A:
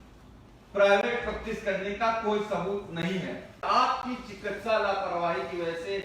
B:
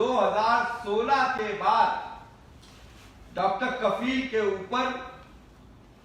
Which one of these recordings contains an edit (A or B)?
A